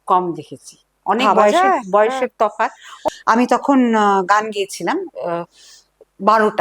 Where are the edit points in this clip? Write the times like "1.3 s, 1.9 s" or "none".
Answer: 2.9 s